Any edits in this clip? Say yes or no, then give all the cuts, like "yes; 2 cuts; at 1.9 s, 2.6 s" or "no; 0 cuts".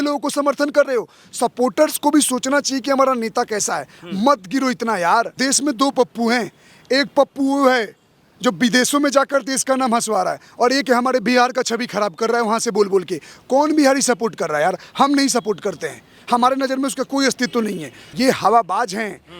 yes; 2 cuts; at 5.4 s, 18.1 s